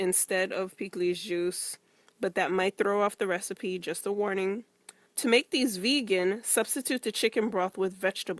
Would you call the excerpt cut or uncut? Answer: cut